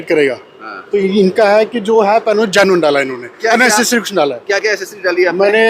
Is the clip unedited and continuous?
yes; 0 cuts

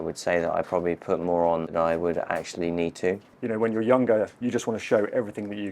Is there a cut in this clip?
yes; 2 cuts; at 1.7 s, 3.3 s

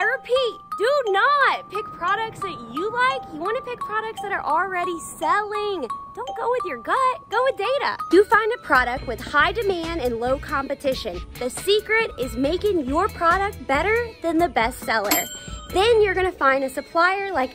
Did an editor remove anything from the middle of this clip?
no; 0 cuts

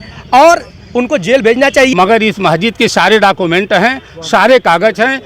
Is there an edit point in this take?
yes; 1 cut; at 1.9 s

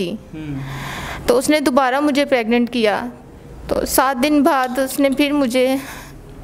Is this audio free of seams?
yes; 0 cuts

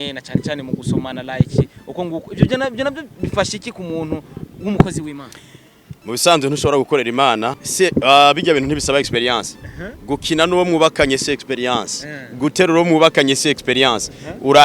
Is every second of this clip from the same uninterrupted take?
no; 1 cut; at 7.6 s

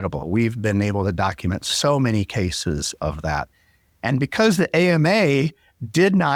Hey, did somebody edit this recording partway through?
no; 0 cuts

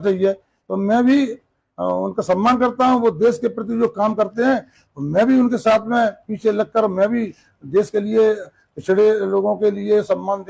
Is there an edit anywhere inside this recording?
no; 0 cuts

